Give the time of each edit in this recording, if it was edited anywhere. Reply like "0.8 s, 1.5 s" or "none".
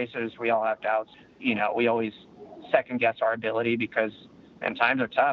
1.2 s